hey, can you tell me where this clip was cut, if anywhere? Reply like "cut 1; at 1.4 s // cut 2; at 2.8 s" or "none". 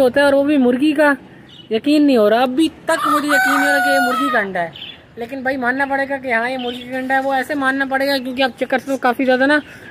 none